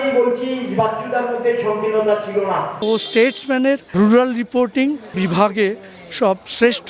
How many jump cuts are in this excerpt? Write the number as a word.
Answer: three